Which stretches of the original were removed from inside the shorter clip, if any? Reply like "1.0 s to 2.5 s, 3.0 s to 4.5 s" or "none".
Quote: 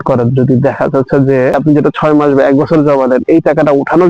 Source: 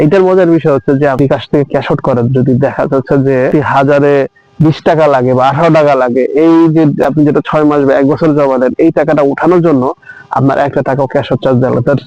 3.5 s to 7.0 s